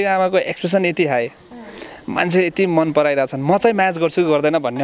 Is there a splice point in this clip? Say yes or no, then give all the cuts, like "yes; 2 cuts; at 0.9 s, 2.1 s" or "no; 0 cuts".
no; 0 cuts